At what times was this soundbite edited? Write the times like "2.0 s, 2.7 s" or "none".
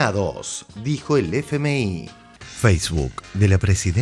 2.4 s